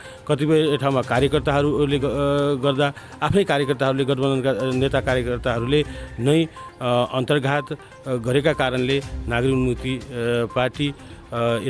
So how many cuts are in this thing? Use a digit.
0